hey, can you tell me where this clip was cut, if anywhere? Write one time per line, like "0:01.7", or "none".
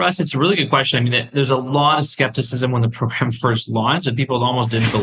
none